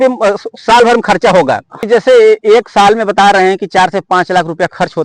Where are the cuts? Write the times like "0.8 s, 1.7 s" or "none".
1.9 s

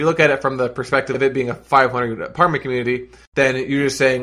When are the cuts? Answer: 3.2 s

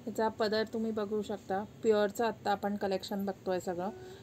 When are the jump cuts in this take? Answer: none

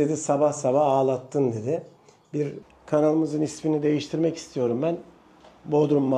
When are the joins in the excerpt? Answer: 2.6 s

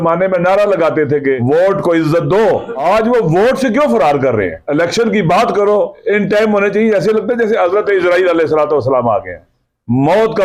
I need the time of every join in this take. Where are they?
1.4 s, 2.7 s, 4.6 s, 6.0 s

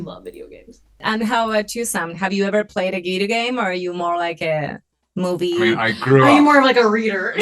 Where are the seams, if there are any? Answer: 1.0 s

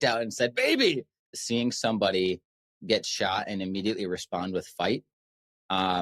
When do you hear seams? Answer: 1.3 s

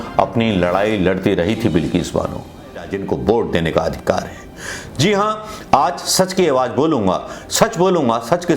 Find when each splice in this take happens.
2.9 s

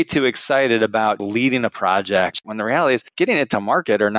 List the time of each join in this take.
1.2 s, 2.7 s

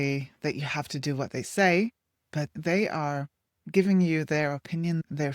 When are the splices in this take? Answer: none

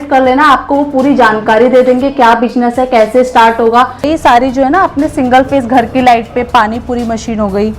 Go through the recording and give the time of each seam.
4.1 s

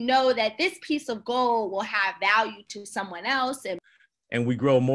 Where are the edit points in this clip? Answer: 3.9 s

